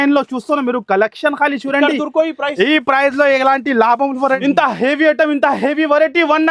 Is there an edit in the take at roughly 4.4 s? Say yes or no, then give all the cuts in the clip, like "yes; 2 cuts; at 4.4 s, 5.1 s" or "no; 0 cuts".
yes; 1 cut; at 4.4 s